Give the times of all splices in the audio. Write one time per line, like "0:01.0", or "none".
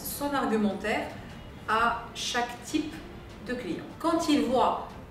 0:03.9